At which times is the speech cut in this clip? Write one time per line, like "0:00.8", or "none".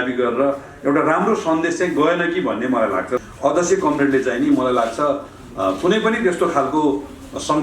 0:03.1